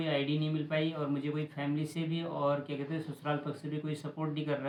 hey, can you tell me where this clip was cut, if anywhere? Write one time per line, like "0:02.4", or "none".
none